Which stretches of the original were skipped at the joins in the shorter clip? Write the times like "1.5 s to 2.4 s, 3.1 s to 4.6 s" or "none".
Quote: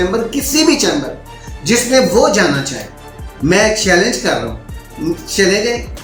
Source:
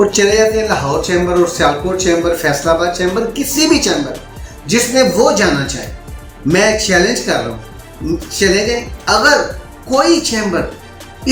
none